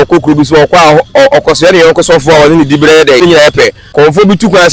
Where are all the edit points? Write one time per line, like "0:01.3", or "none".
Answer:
0:03.6